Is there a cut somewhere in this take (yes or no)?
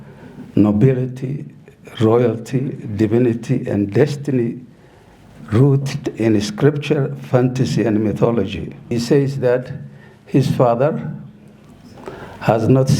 yes